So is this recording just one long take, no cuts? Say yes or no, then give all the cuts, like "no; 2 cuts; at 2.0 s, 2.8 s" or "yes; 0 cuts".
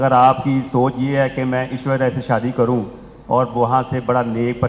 yes; 0 cuts